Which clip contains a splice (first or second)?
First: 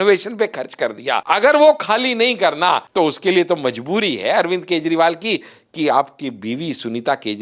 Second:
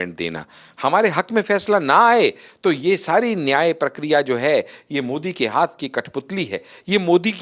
first